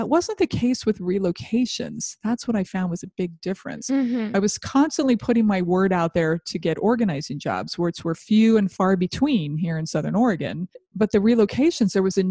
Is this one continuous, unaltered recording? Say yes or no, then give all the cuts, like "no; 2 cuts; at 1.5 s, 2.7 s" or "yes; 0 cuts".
no; 1 cut; at 10.8 s